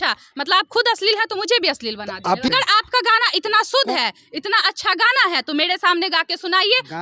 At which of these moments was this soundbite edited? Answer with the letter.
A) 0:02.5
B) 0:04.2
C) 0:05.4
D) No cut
A